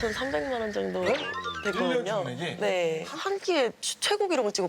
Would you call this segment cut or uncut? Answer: cut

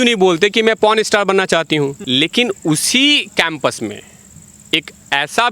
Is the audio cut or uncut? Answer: cut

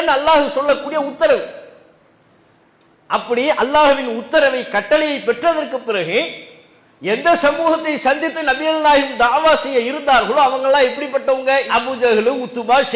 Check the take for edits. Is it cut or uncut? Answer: uncut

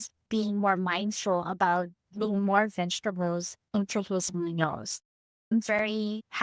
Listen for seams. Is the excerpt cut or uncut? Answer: uncut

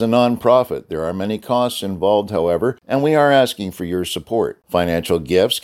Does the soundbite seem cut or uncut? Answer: cut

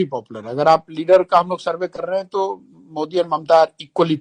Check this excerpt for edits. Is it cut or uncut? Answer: uncut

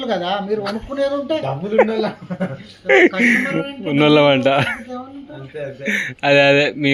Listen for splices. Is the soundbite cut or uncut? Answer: uncut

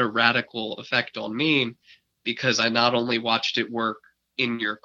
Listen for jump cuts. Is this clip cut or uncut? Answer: uncut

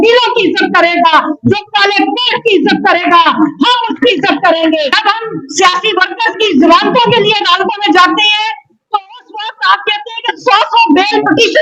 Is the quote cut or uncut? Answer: cut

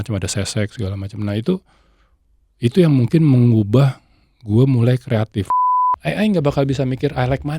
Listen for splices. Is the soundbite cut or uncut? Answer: cut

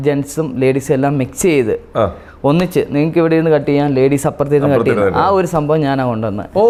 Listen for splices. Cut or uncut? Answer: uncut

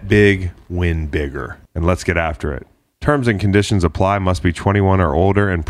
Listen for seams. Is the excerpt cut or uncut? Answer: cut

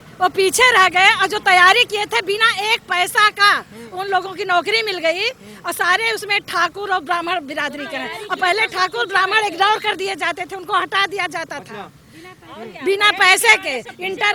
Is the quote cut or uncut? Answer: uncut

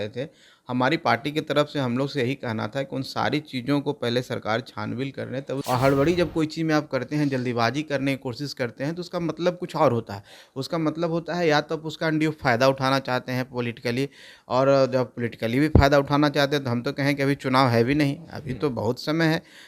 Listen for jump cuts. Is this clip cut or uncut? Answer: cut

